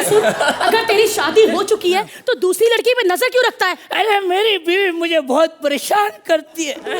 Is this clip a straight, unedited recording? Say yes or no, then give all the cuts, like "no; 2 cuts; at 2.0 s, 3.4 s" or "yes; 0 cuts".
yes; 0 cuts